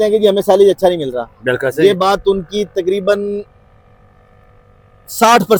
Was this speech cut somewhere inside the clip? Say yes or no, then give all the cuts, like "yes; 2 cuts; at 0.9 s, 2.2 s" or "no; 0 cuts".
no; 0 cuts